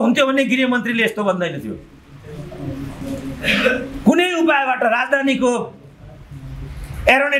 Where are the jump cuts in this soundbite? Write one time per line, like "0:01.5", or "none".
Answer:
none